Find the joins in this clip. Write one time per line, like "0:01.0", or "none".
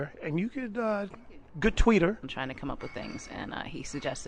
none

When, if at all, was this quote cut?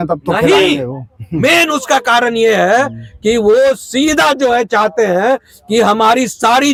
none

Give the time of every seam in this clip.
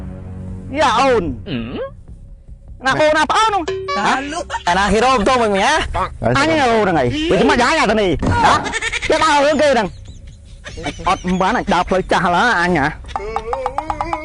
0:04.6

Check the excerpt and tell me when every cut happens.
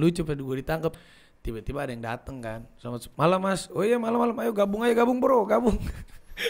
0:01.0

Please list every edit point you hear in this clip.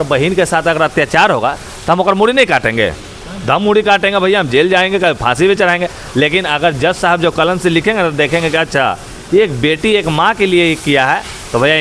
none

